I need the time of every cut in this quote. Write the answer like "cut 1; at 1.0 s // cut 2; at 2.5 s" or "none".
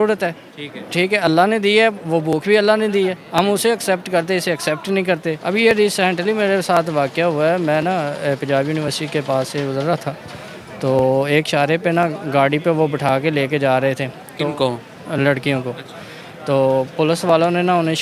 cut 1; at 5.4 s